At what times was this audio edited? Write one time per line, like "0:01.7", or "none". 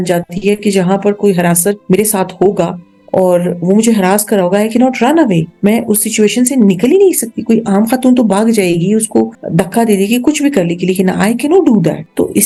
none